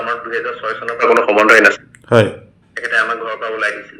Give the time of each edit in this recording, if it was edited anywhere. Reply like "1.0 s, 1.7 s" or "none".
none